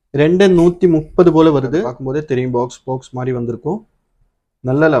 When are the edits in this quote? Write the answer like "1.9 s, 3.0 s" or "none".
2.0 s